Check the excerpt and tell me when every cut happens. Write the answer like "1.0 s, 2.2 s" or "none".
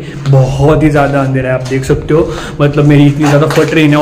none